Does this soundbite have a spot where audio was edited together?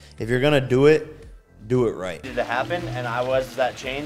yes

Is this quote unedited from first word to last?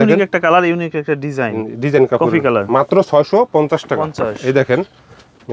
yes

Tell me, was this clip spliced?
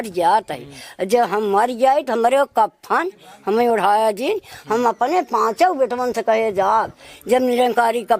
no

